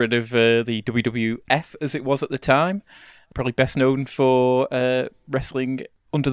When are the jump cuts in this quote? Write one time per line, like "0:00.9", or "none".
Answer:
0:03.2